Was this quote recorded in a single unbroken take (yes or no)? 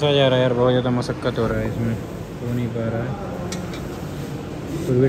yes